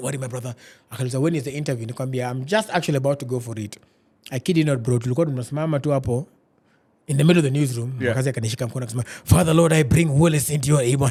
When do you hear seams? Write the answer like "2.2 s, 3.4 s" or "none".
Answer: none